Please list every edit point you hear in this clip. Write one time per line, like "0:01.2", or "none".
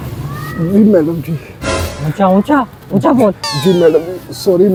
none